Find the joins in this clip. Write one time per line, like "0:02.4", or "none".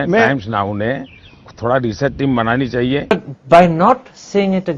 0:03.1